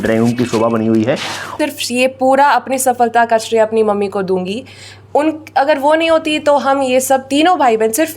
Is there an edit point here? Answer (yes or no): yes